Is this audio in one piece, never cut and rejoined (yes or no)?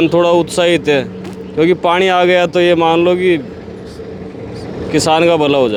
yes